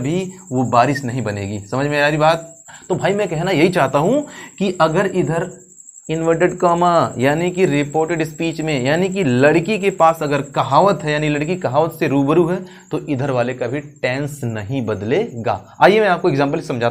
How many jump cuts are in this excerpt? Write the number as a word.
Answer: zero